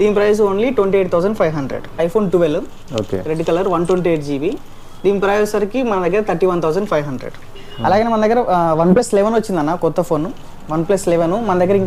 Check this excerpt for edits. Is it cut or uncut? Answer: cut